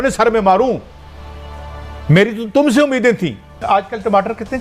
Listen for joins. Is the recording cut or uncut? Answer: cut